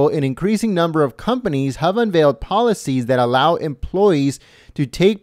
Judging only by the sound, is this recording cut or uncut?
uncut